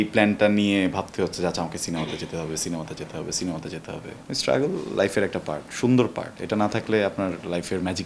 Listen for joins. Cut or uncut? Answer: cut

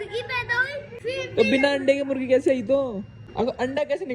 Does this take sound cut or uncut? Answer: cut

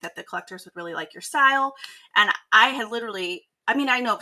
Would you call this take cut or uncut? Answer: uncut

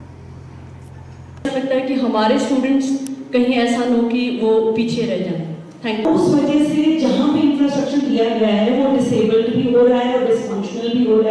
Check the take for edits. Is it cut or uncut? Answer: cut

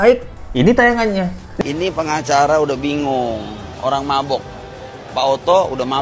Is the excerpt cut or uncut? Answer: uncut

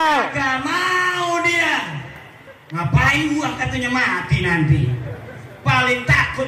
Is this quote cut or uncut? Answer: uncut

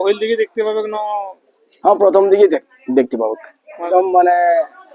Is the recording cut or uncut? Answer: cut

